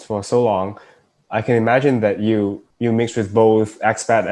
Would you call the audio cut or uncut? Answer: cut